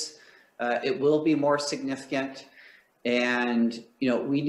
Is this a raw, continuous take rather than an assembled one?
yes; 0 cuts

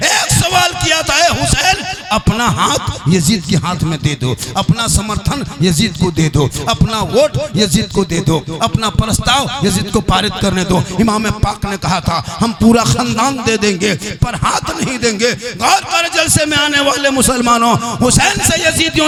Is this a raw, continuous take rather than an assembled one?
yes; 0 cuts

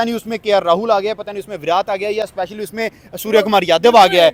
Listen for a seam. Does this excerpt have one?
no; 0 cuts

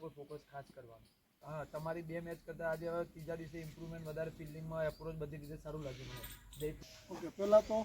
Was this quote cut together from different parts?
yes; 2 cuts; at 1.4 s, 6.8 s

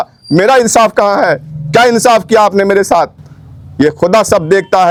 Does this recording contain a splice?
no; 0 cuts

